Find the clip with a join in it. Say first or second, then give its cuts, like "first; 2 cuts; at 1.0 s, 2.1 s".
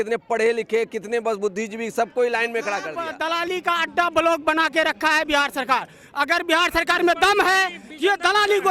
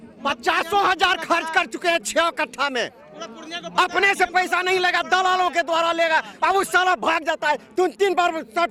first; 1 cut; at 3.1 s